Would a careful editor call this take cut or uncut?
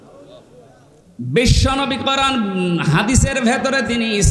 cut